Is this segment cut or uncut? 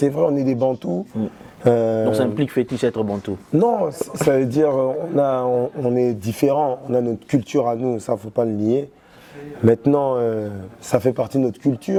uncut